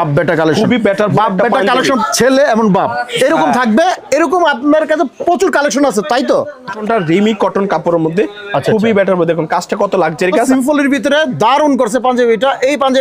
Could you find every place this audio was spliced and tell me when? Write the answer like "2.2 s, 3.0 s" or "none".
2.0 s, 6.8 s, 10.5 s